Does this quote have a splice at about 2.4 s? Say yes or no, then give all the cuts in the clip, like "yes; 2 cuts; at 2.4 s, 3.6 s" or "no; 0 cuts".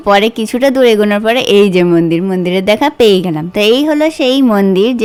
no; 0 cuts